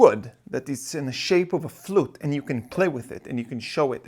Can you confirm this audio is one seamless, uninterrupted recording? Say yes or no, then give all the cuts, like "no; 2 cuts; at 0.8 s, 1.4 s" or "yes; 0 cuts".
yes; 0 cuts